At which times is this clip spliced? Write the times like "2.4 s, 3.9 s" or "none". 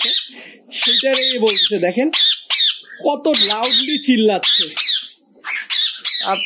none